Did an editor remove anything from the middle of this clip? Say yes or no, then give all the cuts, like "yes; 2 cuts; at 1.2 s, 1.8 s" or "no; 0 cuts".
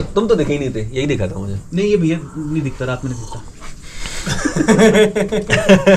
no; 0 cuts